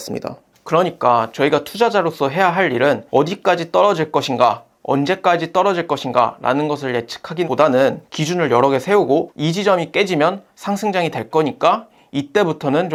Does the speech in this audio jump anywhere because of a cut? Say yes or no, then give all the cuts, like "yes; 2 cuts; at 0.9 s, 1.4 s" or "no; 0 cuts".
no; 0 cuts